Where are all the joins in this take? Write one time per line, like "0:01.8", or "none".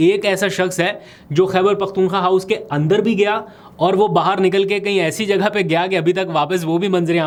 none